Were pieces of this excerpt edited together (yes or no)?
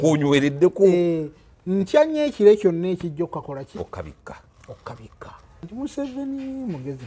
yes